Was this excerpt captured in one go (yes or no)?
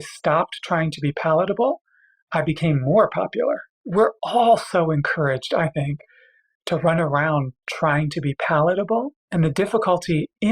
no